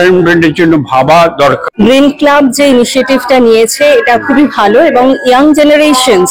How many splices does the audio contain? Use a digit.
1